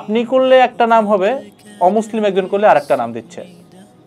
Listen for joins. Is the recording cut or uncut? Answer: uncut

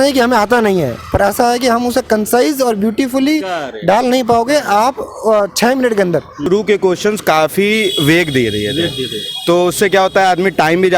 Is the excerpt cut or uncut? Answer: cut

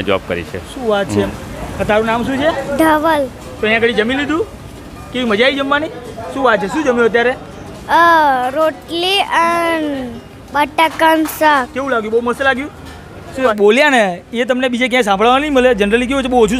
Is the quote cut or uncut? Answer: cut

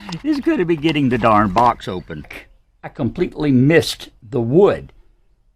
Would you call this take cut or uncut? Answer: cut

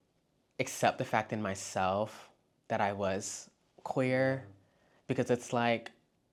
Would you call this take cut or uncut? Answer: uncut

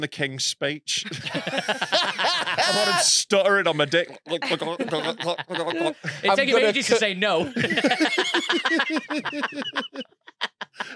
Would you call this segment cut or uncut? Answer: uncut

